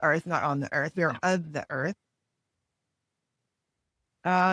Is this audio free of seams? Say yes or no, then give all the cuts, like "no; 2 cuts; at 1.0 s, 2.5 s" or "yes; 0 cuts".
yes; 0 cuts